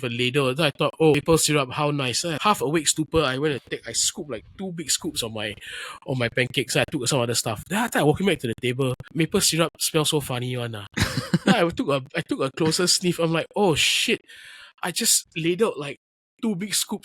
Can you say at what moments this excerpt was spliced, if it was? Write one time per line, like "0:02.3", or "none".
0:01.2
0:02.4
0:09.0